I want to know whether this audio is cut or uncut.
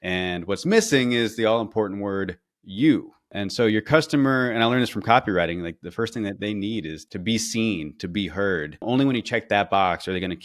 cut